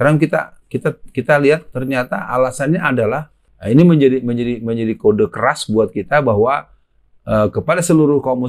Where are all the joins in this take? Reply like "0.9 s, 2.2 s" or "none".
3.5 s